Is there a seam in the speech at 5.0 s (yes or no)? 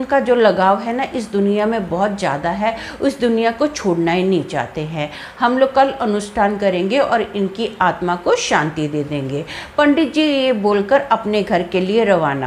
no